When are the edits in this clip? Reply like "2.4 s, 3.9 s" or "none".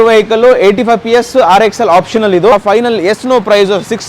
2.5 s